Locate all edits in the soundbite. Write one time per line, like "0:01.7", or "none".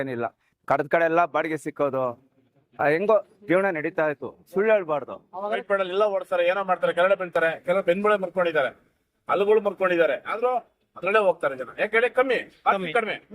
0:05.6